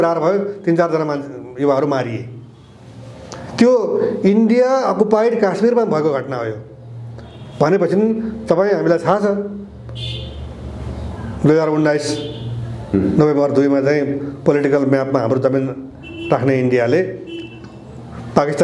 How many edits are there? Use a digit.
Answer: 0